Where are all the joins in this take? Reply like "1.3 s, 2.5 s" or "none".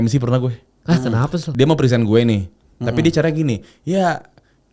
1.5 s